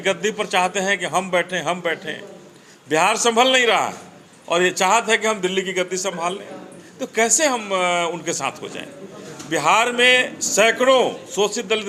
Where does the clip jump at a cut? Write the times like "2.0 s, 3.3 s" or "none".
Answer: none